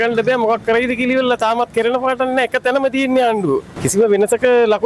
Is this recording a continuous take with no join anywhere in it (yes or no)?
no